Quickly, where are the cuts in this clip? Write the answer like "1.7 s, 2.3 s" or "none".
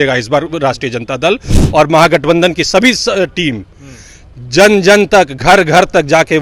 none

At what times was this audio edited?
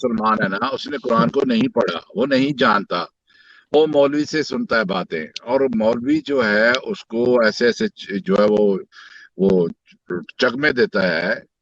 none

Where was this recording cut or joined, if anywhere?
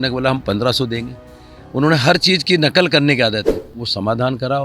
3.6 s

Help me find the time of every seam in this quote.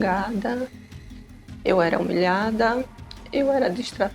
none

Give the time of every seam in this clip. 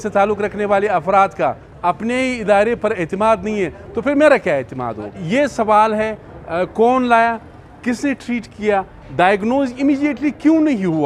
5.2 s

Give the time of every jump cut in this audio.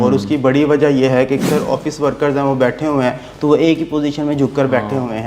1.4 s

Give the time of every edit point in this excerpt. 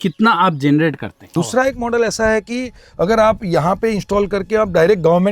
1.3 s

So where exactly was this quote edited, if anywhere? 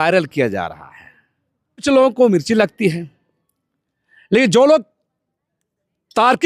1.8 s

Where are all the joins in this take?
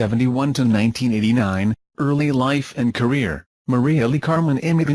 none

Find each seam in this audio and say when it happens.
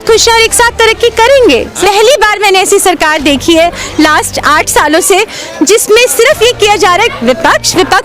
1.8 s

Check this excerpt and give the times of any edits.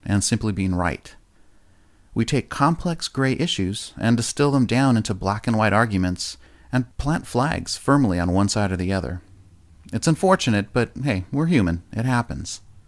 5.8 s

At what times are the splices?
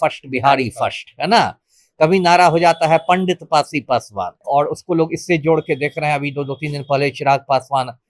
4.4 s

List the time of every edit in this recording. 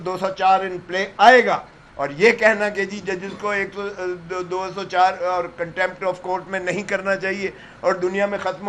none

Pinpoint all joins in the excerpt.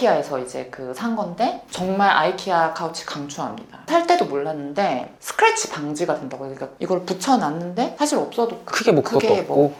none

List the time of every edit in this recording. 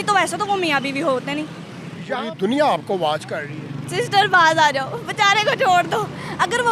2.2 s

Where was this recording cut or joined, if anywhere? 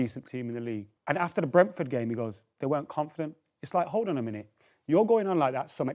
0.9 s

